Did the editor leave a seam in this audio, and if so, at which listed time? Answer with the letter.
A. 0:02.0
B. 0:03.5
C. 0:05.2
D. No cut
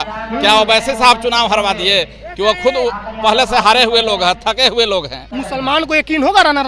C